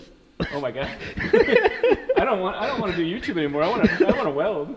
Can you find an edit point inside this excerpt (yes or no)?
no